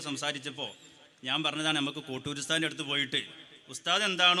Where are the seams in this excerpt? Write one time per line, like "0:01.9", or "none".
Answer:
none